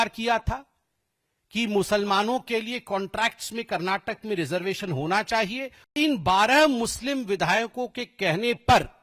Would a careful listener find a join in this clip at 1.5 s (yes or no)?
no